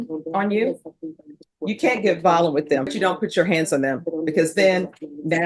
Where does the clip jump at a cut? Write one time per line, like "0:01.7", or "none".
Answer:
0:02.9